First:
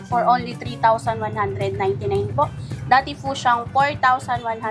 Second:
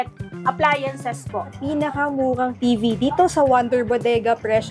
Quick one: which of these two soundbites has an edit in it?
second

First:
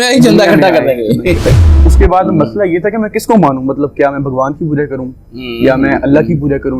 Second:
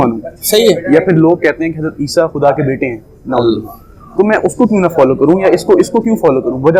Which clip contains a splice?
first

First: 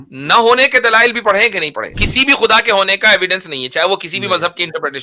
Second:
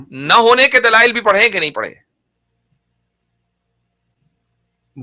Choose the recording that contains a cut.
first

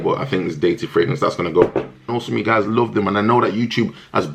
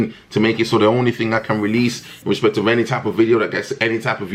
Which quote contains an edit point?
first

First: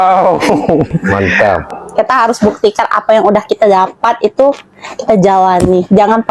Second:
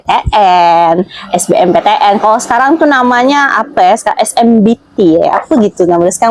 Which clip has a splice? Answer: first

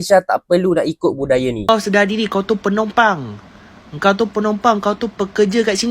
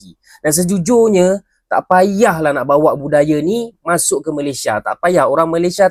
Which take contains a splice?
first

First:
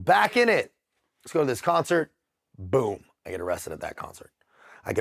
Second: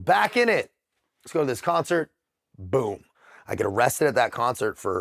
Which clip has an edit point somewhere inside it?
second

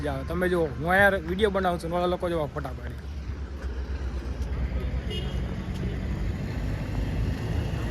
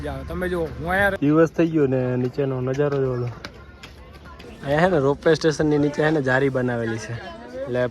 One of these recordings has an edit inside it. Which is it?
second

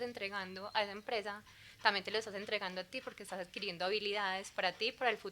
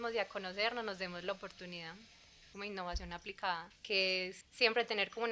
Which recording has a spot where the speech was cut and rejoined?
second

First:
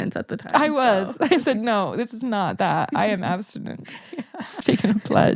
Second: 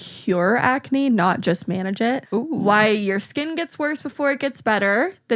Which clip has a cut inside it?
second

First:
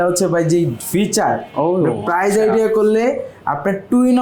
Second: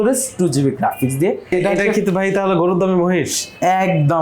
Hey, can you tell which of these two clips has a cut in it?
second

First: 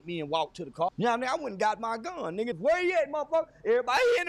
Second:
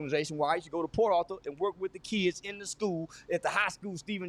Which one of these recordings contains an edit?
first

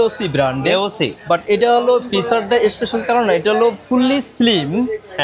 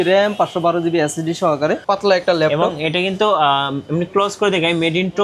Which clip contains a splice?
second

